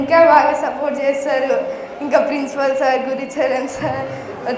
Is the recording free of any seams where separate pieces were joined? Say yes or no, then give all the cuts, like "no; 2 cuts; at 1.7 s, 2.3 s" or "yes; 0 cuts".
yes; 0 cuts